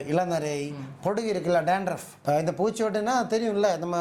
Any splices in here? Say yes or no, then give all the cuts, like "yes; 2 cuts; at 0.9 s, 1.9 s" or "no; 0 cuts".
no; 0 cuts